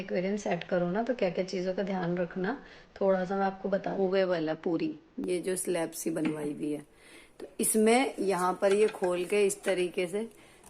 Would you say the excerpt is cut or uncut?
cut